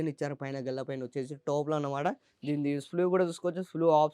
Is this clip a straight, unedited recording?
yes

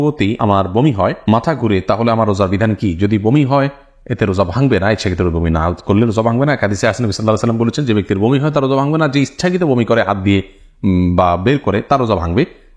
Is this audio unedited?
yes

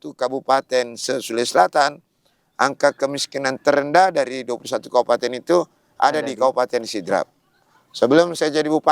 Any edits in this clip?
no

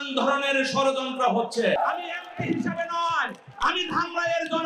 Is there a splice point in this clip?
yes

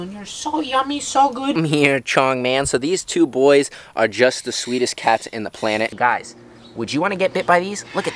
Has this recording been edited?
yes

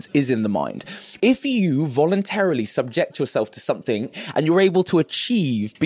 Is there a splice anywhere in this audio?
yes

